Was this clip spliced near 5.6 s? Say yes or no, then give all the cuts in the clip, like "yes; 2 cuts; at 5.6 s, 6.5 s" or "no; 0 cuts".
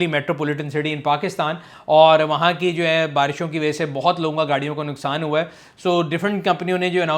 no; 0 cuts